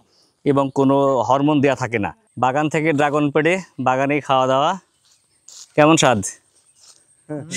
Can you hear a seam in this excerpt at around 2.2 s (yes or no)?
yes